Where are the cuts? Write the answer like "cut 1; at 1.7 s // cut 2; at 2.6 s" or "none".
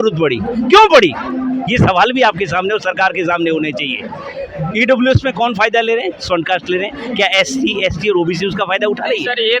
none